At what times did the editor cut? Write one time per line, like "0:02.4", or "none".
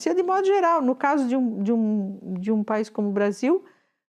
none

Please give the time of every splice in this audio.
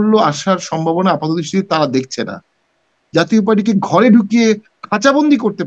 0:02.8

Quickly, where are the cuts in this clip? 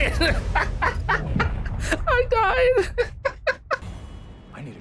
0:03.8

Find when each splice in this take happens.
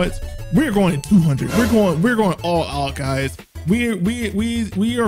none

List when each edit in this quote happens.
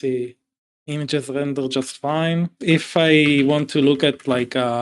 0:02.6

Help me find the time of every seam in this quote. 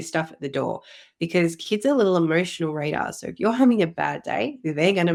none

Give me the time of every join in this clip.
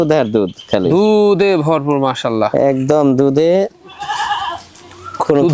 none

